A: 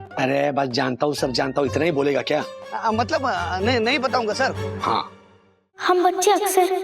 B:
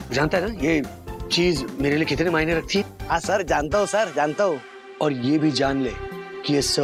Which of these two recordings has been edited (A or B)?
A